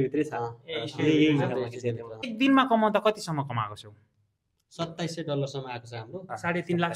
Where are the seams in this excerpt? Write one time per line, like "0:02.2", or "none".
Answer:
0:02.3